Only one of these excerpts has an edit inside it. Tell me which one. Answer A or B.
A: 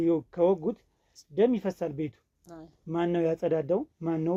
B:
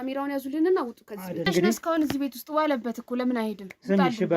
B